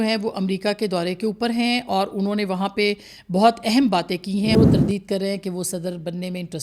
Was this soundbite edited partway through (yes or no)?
yes